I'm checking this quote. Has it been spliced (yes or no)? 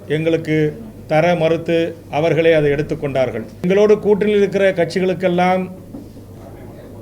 yes